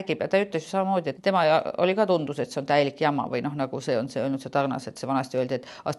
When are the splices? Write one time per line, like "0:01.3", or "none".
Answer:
0:01.1